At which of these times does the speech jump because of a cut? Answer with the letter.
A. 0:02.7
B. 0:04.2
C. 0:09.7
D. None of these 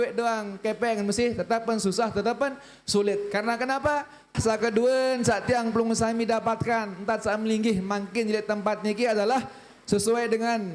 B